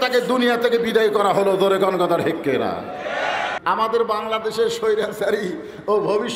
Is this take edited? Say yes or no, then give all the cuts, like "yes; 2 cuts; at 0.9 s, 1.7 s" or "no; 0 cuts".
yes; 1 cut; at 3.6 s